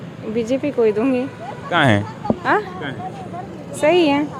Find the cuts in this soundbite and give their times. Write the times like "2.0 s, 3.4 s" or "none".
none